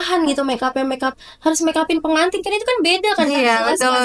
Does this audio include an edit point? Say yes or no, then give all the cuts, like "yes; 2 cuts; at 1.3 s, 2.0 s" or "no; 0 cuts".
no; 0 cuts